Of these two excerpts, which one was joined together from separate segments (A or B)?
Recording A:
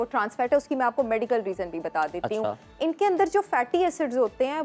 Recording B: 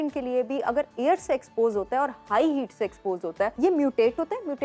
B